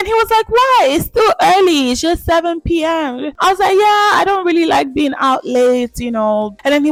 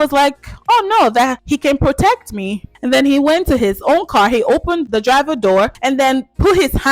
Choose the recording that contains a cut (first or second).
second